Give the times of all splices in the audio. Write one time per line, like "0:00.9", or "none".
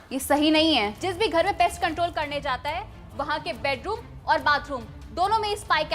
0:01.0